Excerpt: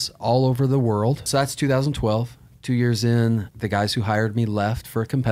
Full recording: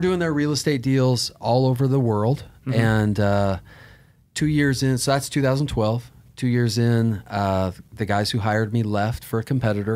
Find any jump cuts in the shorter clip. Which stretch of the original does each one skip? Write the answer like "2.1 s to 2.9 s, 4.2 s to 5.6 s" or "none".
2.5 s to 5.0 s, 7.2 s to 7.9 s